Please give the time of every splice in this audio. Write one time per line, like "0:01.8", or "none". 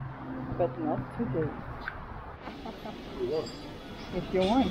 0:02.4